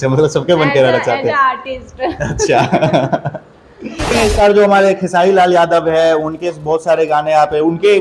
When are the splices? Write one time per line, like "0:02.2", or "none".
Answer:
0:04.1